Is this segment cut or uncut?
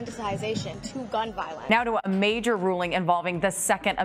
cut